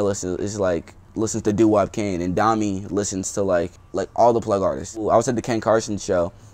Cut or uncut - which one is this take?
cut